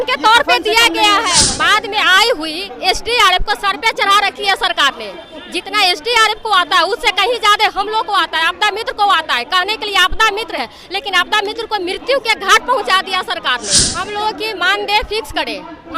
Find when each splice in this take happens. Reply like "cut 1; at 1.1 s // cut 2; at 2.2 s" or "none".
cut 1; at 1.4 s // cut 2; at 13.8 s